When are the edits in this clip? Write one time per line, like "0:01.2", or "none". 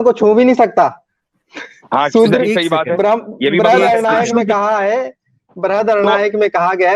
none